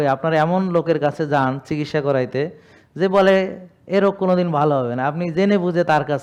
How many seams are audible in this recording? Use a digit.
0